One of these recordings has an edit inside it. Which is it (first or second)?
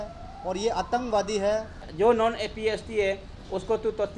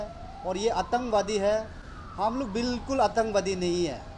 first